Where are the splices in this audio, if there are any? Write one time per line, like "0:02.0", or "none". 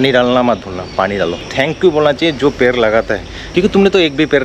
0:01.5
0:03.4